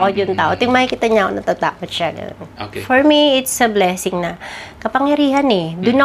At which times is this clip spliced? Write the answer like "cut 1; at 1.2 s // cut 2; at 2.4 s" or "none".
none